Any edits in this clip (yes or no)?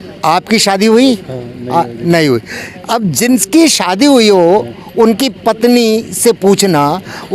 no